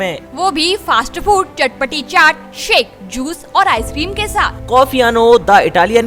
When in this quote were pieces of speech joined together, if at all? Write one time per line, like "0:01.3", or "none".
none

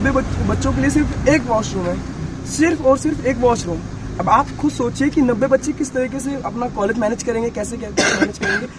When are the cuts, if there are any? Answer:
none

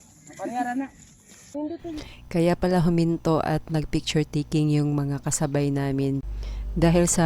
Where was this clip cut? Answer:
0:01.5

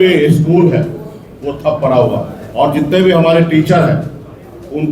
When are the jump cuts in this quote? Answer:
0:02.4

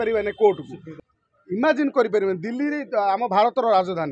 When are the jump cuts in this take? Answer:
0:01.0

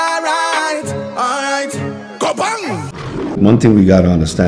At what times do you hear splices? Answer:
0:03.3

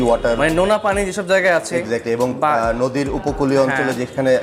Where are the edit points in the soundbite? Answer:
none

